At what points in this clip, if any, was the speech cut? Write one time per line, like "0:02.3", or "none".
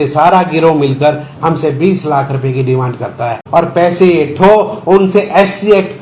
0:03.4